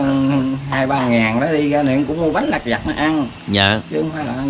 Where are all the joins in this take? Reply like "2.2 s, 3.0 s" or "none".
none